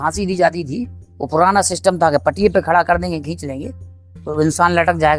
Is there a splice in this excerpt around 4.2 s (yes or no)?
no